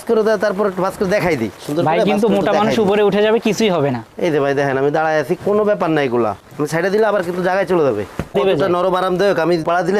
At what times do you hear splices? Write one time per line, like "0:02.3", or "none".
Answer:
0:01.5
0:06.5
0:08.3